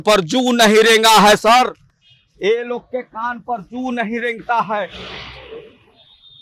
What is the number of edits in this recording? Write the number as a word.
zero